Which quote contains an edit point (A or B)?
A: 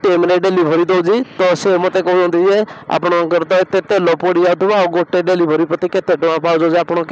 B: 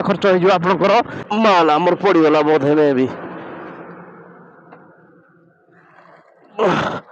B